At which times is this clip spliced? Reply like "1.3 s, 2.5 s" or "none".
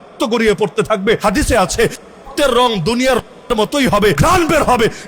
1.2 s, 4.2 s